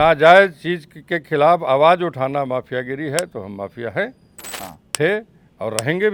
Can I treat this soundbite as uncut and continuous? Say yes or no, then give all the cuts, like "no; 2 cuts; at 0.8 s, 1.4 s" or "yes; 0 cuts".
yes; 0 cuts